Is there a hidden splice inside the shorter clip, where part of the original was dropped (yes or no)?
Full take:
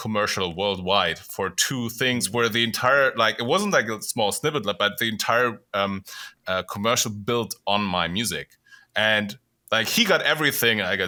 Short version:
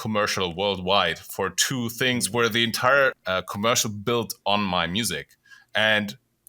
yes